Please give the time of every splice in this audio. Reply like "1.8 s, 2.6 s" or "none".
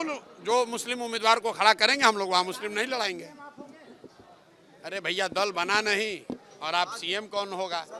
none

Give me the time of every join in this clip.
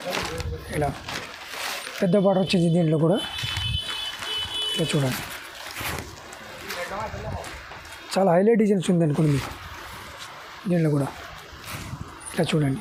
none

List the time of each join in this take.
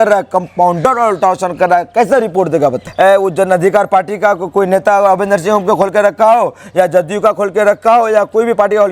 2.8 s

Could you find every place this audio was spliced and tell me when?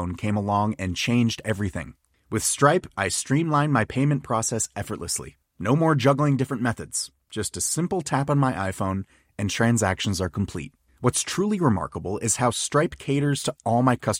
none

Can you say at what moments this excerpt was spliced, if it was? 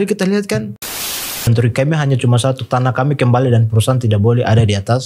1.2 s

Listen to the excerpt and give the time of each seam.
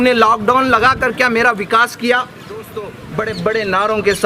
3.0 s

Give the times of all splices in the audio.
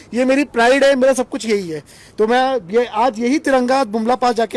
none

